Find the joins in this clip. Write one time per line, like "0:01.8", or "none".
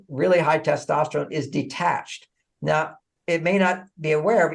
0:03.1